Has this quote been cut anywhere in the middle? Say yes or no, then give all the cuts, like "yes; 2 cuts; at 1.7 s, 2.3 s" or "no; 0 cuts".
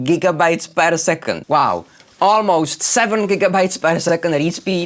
yes; 1 cut; at 1.3 s